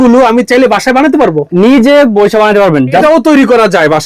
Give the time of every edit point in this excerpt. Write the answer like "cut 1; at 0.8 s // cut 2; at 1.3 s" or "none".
cut 1; at 3.0 s